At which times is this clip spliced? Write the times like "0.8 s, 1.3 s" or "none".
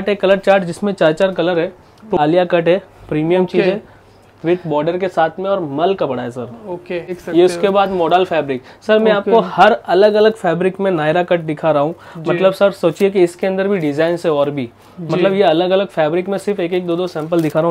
2.2 s, 7.2 s